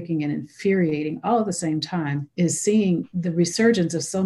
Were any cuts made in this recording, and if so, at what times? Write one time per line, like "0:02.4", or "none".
0:02.2
0:03.1